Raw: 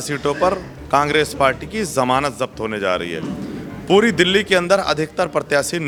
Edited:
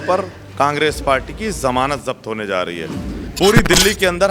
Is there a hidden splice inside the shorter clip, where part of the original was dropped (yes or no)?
yes